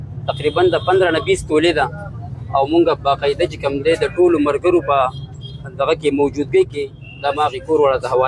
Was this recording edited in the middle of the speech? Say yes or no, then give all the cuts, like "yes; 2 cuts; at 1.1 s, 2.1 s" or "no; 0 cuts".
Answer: no; 0 cuts